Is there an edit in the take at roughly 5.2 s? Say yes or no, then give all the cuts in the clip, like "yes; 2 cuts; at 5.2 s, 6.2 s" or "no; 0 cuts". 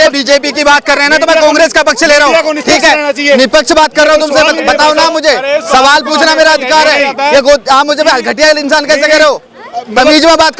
no; 0 cuts